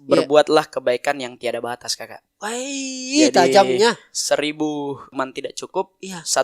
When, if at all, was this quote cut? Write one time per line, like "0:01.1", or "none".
0:05.1

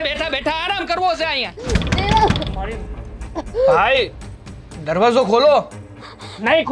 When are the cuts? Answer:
0:01.6

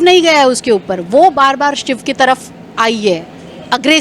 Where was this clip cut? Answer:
none

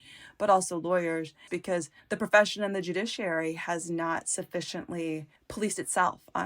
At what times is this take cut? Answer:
0:01.6
0:05.4

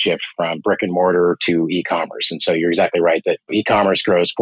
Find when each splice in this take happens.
0:03.5

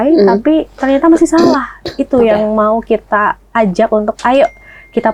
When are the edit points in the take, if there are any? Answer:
none

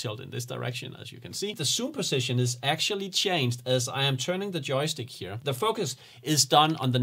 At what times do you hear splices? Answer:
0:01.6
0:05.3

